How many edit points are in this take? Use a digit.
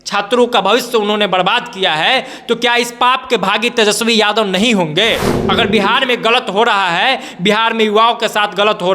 1